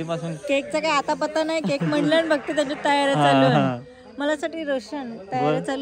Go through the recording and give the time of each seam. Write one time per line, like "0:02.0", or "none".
none